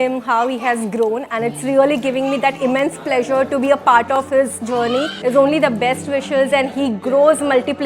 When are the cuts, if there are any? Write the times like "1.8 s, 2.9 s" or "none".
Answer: 5.1 s